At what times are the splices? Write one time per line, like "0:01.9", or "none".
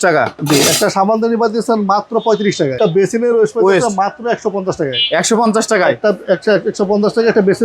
0:02.8

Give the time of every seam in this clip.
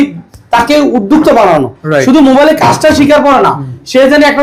none

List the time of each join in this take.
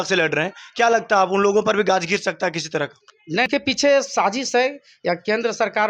0:03.5

